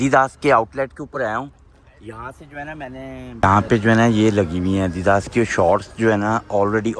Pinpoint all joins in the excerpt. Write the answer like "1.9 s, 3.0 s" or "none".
3.4 s